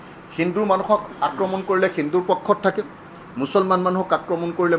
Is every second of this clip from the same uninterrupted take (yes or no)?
yes